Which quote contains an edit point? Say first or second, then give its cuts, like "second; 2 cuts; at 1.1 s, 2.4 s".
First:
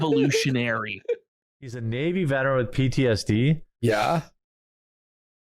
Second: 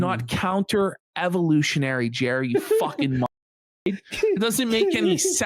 first; 1 cut; at 1.8 s